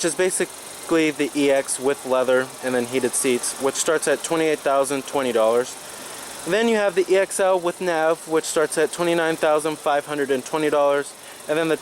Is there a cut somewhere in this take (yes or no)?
no